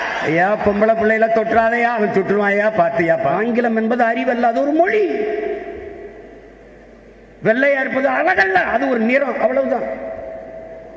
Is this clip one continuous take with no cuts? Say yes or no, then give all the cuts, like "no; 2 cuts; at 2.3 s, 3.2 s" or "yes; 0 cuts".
no; 1 cut; at 3.3 s